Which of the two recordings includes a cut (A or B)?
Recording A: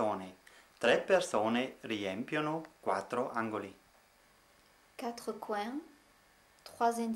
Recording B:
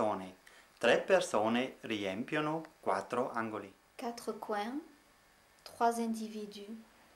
B